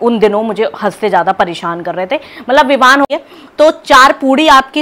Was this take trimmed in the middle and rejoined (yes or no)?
yes